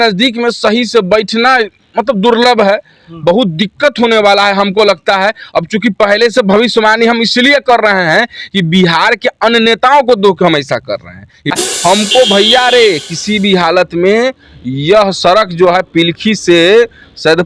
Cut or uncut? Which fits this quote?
cut